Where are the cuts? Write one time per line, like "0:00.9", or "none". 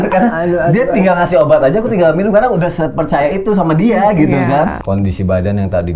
0:04.8